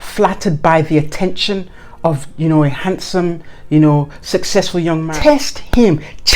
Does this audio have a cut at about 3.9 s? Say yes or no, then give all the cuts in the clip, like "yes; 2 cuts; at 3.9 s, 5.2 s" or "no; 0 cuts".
no; 1 cut; at 5.1 s